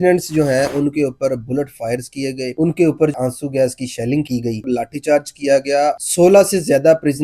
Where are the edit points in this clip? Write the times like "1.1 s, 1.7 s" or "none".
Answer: 3.1 s, 4.6 s, 6.0 s